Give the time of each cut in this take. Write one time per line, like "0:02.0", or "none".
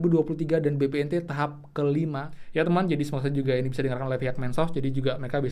0:02.3